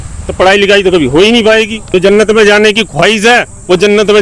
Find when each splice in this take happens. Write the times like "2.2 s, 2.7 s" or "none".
1.8 s